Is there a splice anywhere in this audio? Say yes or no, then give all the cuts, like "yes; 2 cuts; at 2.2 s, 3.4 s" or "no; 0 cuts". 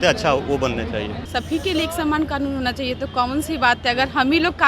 yes; 1 cut; at 1.2 s